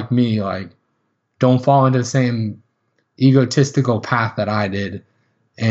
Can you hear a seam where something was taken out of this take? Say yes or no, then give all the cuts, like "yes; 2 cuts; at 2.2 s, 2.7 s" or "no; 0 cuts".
no; 0 cuts